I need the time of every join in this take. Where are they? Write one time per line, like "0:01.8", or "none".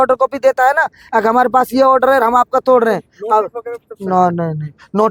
none